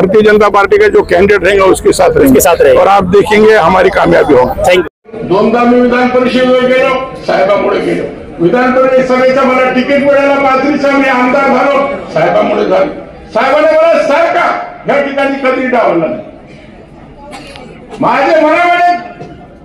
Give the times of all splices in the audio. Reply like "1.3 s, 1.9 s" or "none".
5.0 s